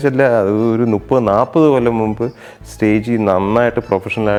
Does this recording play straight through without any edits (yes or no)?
yes